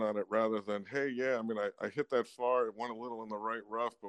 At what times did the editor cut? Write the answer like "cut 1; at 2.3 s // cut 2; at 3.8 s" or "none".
none